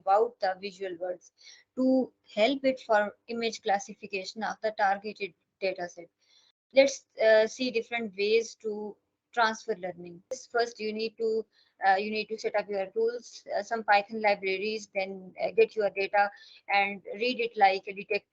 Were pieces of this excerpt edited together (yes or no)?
yes